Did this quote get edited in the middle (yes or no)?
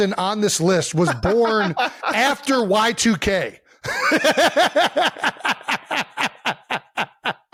no